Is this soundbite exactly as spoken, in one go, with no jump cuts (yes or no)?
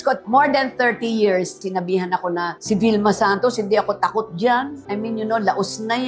no